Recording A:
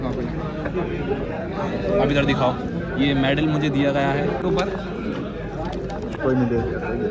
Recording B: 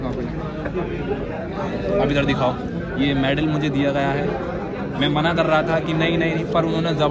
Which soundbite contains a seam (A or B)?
A